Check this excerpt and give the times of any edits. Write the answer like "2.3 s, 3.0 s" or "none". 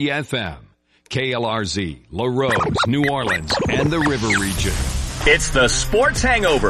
4.5 s